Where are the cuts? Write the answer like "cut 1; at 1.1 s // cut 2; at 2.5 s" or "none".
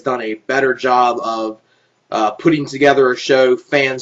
cut 1; at 1.6 s

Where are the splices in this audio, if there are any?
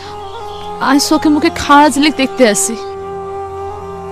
cut 1; at 2.8 s

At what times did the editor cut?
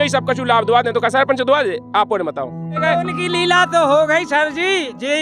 cut 1; at 2.8 s

